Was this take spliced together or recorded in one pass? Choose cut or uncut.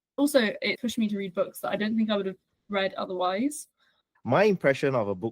cut